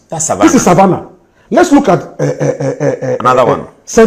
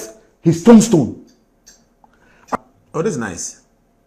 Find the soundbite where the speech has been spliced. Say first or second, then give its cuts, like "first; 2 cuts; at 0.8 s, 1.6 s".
second; 1 cut; at 2.5 s